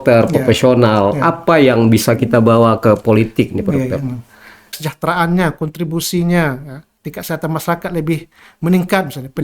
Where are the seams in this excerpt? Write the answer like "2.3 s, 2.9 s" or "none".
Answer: 4.8 s